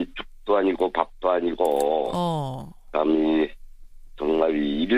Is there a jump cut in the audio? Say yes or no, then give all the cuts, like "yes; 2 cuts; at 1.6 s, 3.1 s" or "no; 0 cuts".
yes; 1 cut; at 2.0 s